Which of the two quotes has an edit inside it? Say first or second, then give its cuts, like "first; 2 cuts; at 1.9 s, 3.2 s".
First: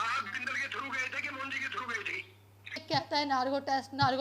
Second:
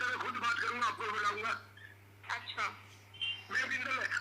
first; 1 cut; at 2.8 s